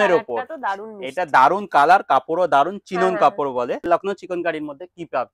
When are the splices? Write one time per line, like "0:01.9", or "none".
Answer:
0:03.9